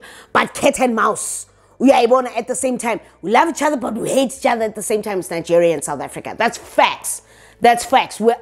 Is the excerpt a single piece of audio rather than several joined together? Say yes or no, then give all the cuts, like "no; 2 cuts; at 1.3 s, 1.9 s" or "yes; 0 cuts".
yes; 0 cuts